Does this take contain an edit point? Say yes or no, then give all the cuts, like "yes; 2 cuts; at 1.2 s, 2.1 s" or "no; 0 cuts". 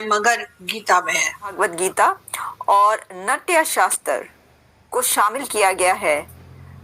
yes; 1 cut; at 1.5 s